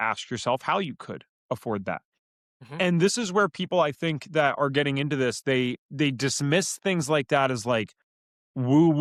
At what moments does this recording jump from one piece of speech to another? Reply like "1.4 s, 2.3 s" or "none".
none